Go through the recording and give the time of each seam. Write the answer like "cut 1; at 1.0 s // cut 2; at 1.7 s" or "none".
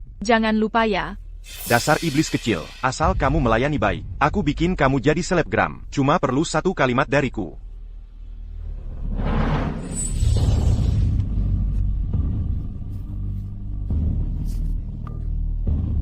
none